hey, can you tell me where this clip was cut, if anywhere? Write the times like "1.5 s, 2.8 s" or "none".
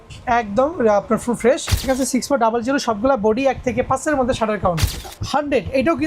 1.8 s, 5.0 s

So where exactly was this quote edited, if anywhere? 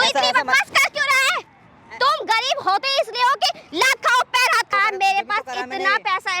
4.7 s

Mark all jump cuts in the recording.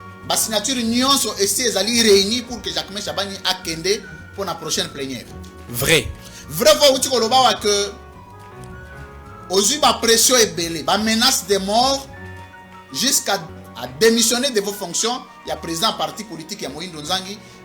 13.6 s

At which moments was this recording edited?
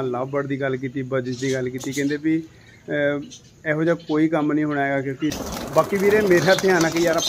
5.4 s

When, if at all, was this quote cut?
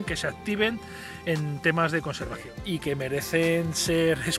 2.5 s

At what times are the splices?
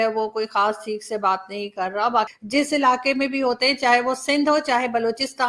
2.4 s

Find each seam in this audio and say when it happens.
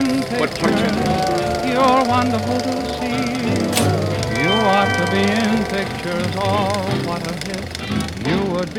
none

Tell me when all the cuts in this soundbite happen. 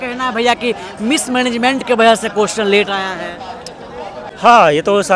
4.2 s

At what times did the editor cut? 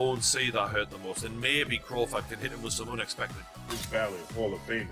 3.8 s

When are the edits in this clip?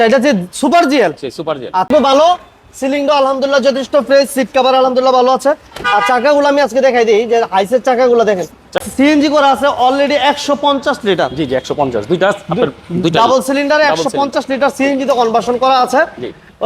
1.9 s, 8.8 s

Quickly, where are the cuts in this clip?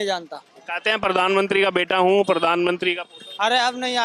none

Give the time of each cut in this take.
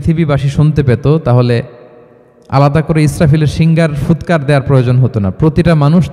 none

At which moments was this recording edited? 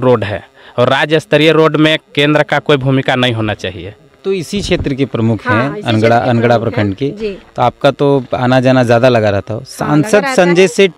4.2 s

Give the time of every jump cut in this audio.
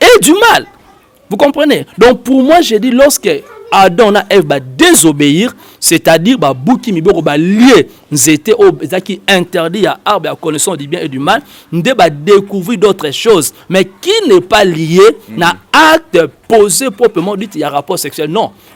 none

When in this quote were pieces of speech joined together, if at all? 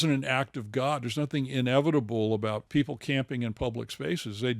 2.6 s

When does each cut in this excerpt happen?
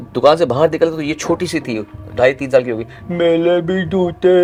none

